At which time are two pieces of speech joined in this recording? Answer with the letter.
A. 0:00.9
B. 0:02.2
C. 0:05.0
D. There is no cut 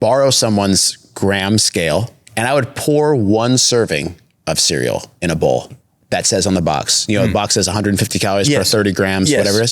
B